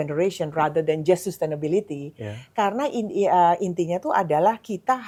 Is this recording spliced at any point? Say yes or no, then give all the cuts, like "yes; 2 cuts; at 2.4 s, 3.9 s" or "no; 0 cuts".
no; 0 cuts